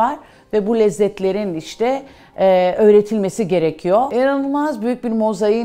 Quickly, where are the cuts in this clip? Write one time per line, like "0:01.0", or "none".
0:04.1